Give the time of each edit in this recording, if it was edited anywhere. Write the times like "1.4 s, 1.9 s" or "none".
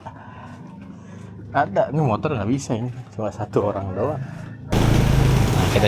4.7 s